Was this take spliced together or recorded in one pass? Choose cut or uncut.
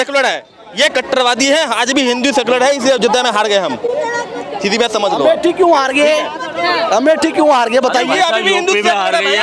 uncut